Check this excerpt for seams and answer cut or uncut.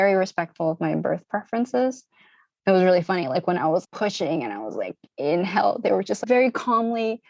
uncut